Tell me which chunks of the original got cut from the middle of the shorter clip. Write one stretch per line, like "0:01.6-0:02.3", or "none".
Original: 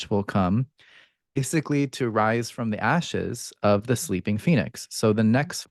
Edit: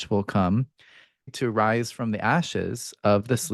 0:01.3-0:01.9